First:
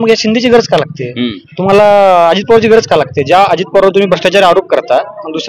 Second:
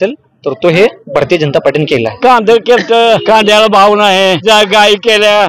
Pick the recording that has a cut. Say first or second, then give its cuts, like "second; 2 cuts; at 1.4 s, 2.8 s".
second; 3 cuts; at 2.2 s, 3.2 s, 4.4 s